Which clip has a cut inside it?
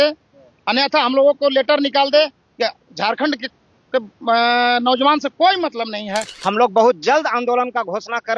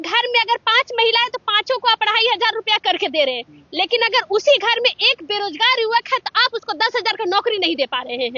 first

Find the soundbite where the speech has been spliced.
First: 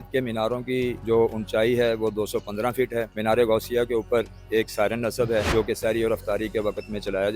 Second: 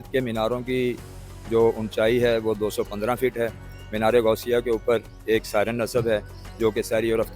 first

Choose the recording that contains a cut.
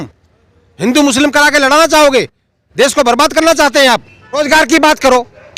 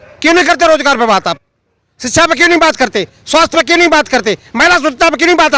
first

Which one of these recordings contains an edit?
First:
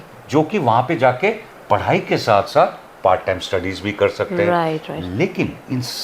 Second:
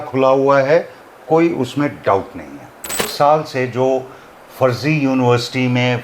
second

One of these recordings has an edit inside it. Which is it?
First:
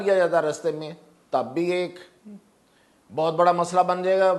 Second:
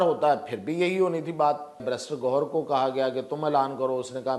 second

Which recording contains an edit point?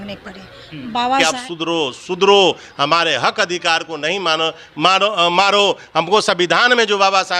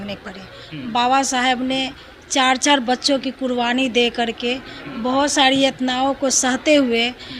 first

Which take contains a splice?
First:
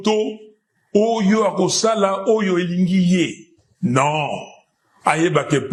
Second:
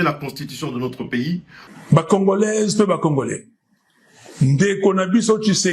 second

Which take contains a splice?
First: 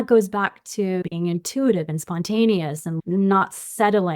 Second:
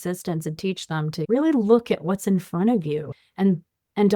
first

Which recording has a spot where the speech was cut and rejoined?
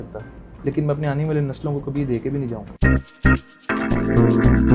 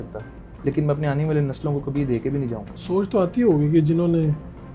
second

